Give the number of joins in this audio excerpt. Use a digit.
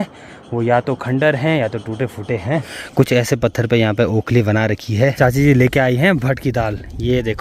2